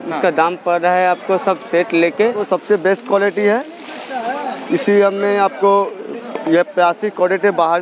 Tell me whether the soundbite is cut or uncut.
cut